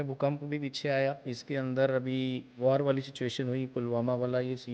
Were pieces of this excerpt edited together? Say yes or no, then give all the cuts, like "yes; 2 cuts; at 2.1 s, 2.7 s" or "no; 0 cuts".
yes; 2 cuts; at 1.3 s, 2.5 s